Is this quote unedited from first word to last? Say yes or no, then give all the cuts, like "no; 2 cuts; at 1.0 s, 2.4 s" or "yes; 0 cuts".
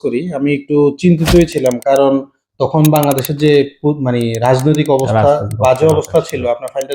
yes; 0 cuts